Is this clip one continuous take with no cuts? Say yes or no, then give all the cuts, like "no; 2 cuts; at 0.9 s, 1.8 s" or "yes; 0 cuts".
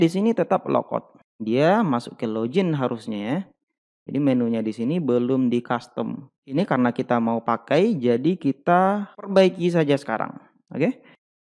yes; 0 cuts